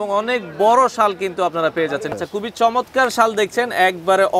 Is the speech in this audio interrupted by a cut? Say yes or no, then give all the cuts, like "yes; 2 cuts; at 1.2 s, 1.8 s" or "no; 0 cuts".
yes; 1 cut; at 2.2 s